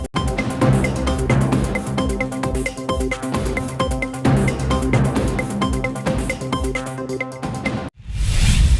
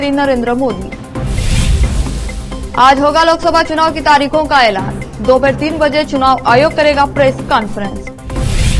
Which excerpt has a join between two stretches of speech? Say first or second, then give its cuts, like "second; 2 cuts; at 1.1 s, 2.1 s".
first; 1 cut; at 7.9 s